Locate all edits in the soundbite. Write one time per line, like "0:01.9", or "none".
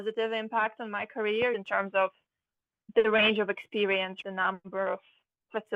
0:01.5
0:04.2